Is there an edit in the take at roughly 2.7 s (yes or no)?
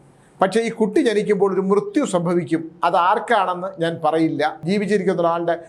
no